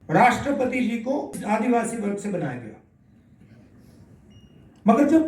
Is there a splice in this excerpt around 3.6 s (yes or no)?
no